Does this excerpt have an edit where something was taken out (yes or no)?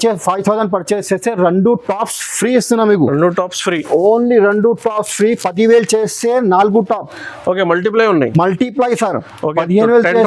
no